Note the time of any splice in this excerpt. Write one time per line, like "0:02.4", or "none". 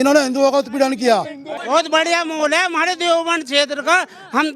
0:01.6